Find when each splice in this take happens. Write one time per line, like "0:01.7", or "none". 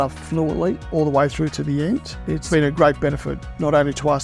0:00.8
0:02.4

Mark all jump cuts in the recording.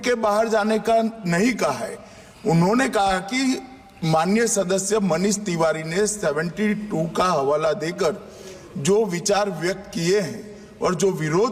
none

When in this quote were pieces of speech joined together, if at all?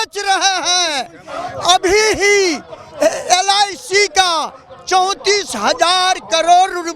none

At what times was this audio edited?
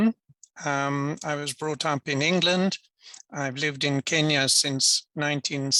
none

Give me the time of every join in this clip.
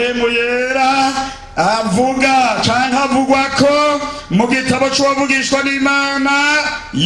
none

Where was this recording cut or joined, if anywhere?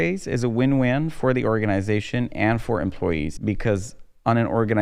0:03.3

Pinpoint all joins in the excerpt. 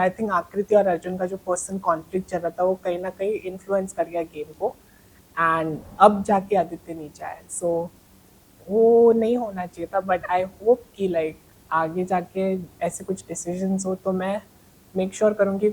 none

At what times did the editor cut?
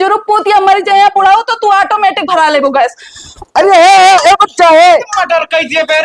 none

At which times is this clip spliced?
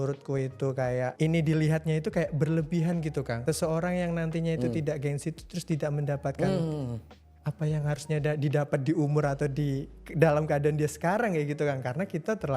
0:01.1
0:03.3

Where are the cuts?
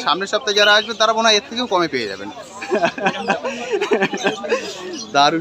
none

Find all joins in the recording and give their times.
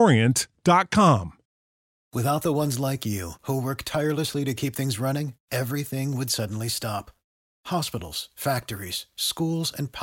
0:01.5

